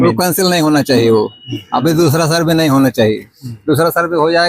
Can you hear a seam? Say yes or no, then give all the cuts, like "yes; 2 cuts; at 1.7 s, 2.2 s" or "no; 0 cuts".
no; 0 cuts